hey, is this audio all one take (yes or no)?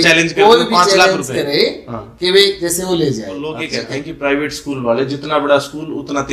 no